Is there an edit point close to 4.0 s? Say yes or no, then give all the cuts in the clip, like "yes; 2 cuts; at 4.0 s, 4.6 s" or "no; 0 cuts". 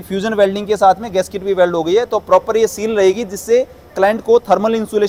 no; 0 cuts